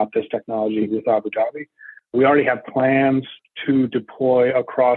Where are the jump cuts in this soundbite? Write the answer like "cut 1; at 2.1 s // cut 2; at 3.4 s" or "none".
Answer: cut 1; at 2.1 s // cut 2; at 3.4 s